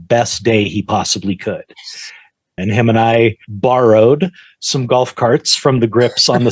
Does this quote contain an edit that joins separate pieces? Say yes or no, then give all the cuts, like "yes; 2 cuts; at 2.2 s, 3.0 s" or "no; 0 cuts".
yes; 1 cut; at 2.5 s